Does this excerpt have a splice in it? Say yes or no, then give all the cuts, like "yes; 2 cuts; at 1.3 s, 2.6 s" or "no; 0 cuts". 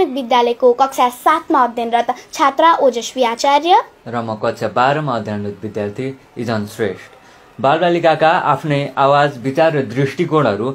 no; 0 cuts